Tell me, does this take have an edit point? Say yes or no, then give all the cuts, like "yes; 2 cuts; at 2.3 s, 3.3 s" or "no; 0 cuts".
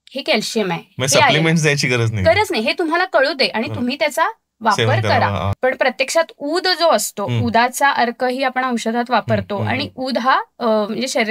yes; 1 cut; at 5.5 s